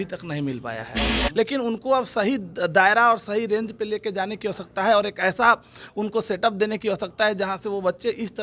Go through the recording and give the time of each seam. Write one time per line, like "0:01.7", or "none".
0:01.1

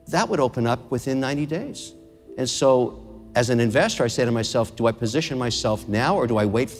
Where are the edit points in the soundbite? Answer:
none

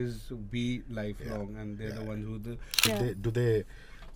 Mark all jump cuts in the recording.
0:02.9

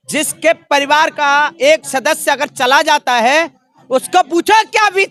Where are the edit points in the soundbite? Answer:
none

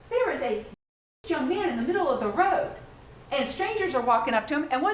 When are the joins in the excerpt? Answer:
none

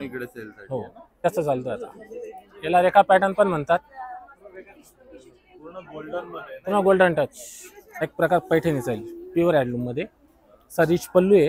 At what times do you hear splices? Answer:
0:01.2
0:07.9

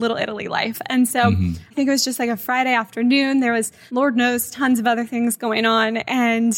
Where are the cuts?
0:01.7
0:03.8

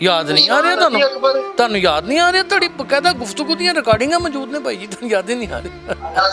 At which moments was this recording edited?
0:01.5

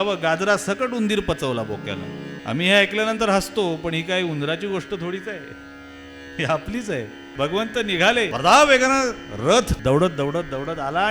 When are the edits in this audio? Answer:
0:02.3
0:07.2
0:08.3
0:09.7

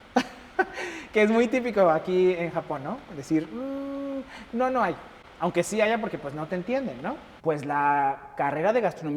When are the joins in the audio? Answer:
0:07.4

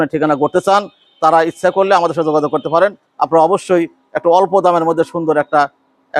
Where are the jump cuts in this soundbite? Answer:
none

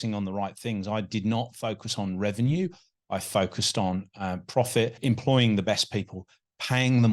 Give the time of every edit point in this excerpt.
0:05.0

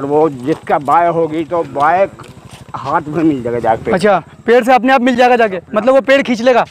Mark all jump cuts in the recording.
none

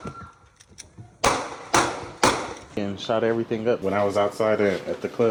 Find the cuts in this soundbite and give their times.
none

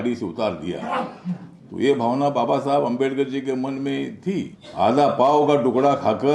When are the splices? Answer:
0:04.6

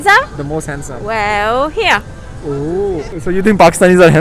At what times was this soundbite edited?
0:03.1

